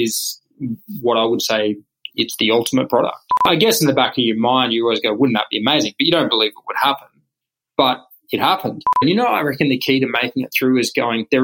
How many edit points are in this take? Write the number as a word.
two